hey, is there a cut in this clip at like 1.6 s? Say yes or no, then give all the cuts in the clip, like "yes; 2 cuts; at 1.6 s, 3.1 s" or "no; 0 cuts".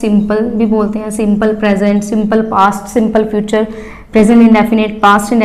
no; 0 cuts